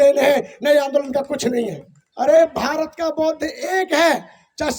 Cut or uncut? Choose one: cut